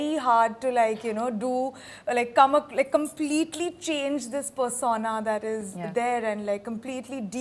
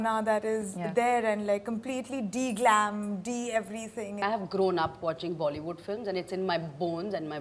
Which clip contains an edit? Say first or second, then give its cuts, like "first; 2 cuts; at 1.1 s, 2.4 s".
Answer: second; 1 cut; at 4.2 s